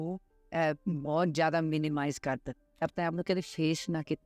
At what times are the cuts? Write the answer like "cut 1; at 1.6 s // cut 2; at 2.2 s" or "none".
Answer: cut 1; at 2.9 s